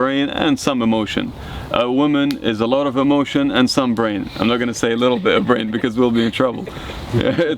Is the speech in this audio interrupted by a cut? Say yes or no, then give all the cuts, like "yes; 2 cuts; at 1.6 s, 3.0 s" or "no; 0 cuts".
no; 0 cuts